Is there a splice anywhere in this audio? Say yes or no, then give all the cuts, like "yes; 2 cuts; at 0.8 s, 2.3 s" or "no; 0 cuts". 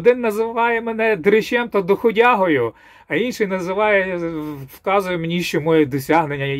no; 0 cuts